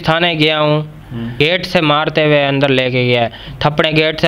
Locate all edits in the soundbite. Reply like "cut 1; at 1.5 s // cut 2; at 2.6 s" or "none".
cut 1; at 1.4 s